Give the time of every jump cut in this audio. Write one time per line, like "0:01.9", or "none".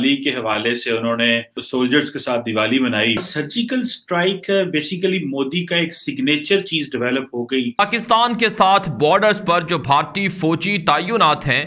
0:01.6
0:03.3
0:07.7

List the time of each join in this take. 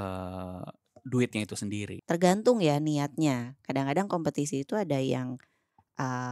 0:01.9

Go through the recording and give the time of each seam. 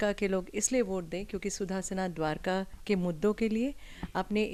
none

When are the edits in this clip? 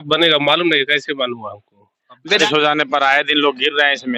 0:02.4

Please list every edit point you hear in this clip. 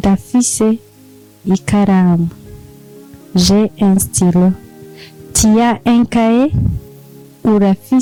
none

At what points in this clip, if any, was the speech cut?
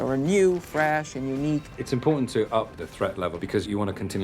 0:01.7
0:03.4

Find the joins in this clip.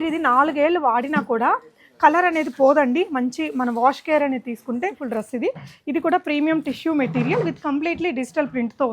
0:05.0

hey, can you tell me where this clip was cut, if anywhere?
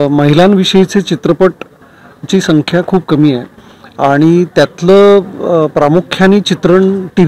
none

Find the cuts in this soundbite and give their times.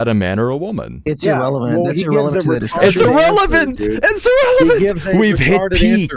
0:01.0

